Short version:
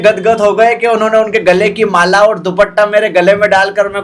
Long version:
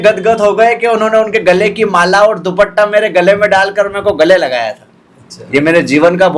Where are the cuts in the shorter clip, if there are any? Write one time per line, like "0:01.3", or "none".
none